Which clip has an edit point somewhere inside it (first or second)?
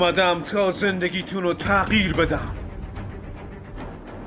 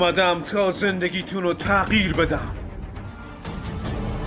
first